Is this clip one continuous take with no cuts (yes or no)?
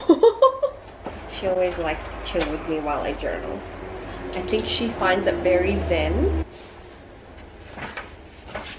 yes